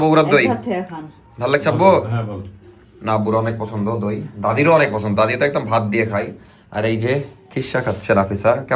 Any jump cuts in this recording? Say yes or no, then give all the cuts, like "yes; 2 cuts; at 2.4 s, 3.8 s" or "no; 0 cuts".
no; 0 cuts